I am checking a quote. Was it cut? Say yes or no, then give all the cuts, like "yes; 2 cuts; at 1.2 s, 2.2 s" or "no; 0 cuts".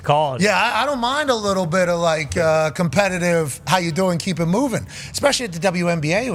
no; 0 cuts